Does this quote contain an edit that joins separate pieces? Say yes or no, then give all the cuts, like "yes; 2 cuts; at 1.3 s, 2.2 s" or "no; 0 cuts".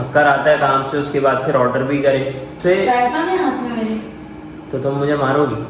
yes; 1 cut; at 2.5 s